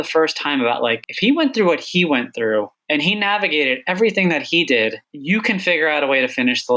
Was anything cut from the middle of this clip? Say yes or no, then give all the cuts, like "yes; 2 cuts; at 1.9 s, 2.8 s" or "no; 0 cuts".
yes; 3 cuts; at 1.1 s, 2.8 s, 5.1 s